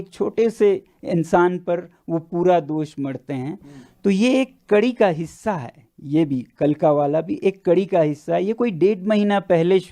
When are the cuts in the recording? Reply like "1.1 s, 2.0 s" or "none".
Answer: none